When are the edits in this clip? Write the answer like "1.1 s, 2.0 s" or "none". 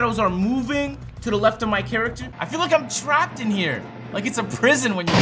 2.2 s